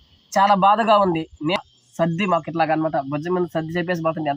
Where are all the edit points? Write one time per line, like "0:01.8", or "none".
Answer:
0:01.6